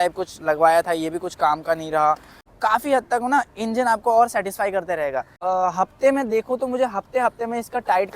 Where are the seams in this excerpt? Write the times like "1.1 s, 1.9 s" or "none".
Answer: 2.5 s, 5.3 s